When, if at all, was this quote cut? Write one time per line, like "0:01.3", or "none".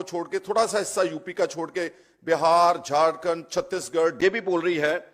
0:04.2